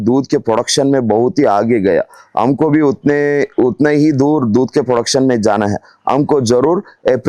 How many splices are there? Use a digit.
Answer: 0